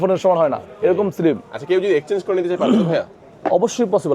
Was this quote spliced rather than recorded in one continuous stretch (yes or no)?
no